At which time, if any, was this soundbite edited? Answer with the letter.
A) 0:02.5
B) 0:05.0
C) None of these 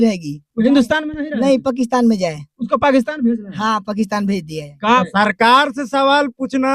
B